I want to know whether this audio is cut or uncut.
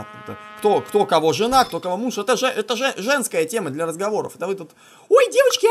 uncut